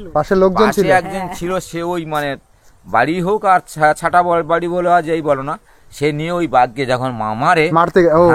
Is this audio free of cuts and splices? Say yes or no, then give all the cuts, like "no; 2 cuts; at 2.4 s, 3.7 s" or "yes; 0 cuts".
yes; 0 cuts